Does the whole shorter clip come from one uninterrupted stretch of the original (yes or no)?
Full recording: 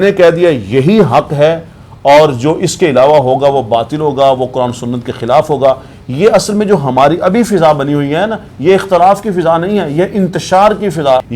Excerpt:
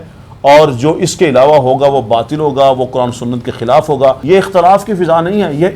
no